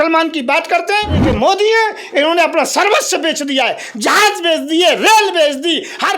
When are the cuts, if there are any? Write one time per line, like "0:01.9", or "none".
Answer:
0:01.2